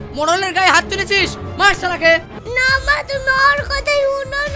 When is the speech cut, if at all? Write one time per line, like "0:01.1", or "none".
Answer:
0:02.3